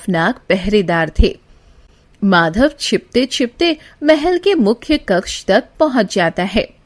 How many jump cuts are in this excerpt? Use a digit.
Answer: 0